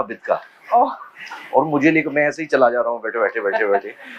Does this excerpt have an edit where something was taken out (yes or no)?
no